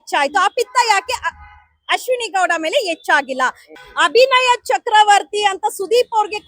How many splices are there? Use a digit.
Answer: 1